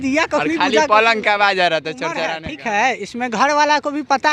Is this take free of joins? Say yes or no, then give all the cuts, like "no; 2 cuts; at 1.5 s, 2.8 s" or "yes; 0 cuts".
no; 1 cut; at 2.3 s